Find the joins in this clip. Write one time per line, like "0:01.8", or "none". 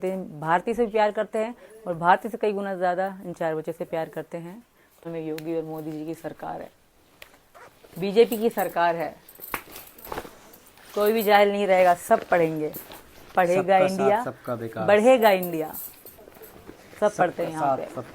0:05.1